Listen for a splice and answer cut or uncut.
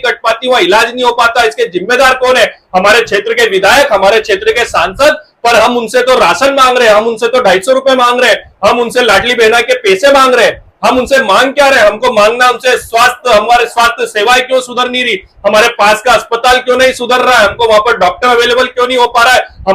uncut